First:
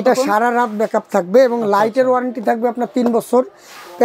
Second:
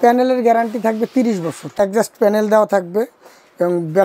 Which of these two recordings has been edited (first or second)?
second